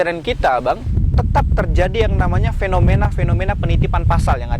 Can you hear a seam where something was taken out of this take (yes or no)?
yes